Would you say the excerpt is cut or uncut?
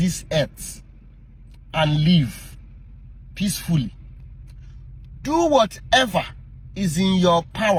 uncut